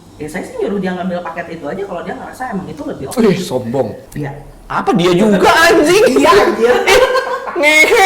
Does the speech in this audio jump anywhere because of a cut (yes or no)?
yes